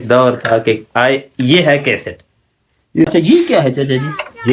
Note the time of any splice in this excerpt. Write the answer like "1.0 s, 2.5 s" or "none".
3.1 s